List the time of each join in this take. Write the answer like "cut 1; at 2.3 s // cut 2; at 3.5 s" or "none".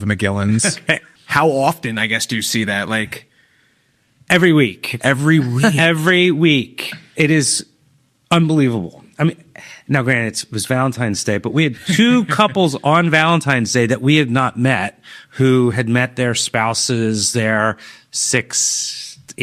cut 1; at 1.1 s